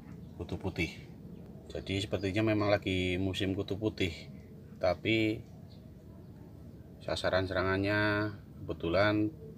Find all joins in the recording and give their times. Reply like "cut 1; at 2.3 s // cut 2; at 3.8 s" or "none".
cut 1; at 1.5 s

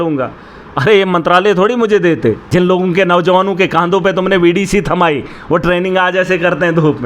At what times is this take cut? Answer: cut 1; at 2.4 s

